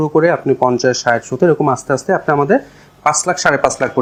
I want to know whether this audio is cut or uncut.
uncut